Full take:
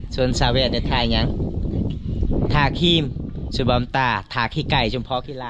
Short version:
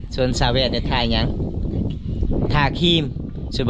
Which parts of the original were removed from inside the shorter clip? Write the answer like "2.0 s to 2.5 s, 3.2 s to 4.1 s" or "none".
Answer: none